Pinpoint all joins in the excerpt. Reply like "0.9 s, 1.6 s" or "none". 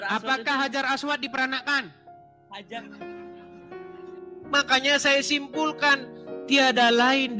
2.8 s

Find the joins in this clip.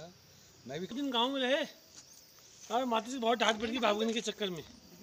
0.9 s

